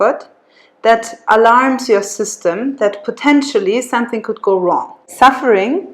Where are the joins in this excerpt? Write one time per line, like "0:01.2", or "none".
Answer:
0:05.0